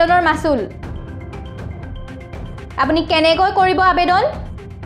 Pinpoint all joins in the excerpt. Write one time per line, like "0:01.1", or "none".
0:00.7
0:02.7